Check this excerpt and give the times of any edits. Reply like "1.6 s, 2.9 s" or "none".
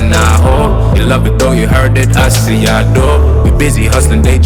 none